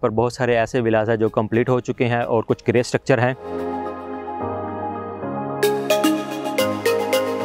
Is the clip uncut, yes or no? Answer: yes